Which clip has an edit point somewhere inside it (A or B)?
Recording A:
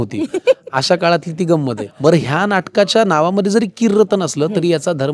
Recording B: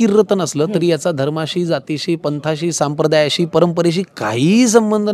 A